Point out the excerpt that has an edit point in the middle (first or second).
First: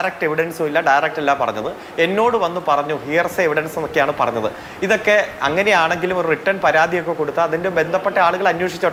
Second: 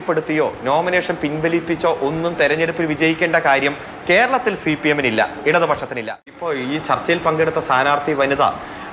second